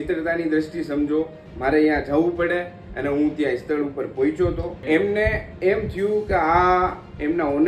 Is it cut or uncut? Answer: cut